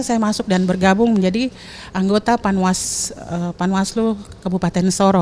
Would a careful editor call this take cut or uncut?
uncut